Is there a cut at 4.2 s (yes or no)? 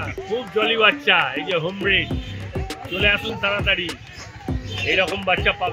no